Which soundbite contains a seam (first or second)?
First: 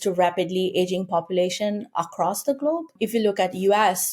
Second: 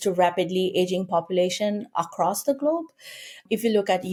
first